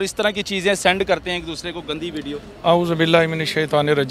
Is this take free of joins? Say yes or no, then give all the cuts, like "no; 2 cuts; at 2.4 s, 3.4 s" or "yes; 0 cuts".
yes; 0 cuts